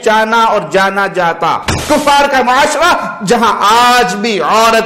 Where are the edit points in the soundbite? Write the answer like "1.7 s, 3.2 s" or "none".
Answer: 1.8 s